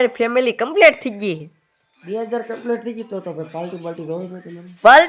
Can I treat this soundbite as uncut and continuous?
yes; 0 cuts

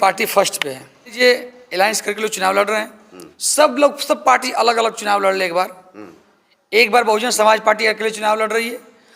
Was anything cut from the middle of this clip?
yes; 1 cut; at 1.1 s

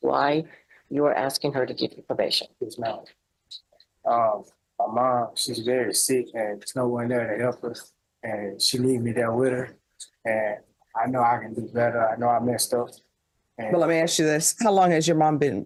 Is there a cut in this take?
no; 0 cuts

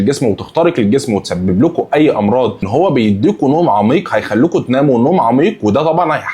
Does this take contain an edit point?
yes; 1 cut; at 2.7 s

